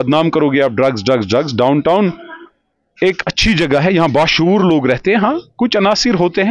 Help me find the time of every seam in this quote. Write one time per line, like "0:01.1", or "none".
none